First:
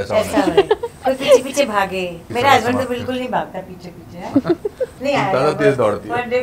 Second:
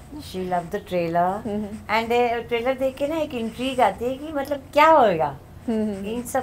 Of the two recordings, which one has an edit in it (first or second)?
first